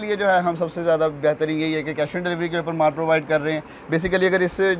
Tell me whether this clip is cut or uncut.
uncut